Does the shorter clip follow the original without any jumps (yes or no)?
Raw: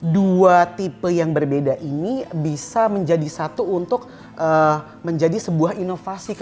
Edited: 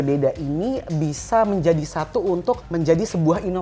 no